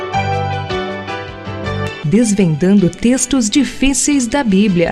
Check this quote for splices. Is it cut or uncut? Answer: uncut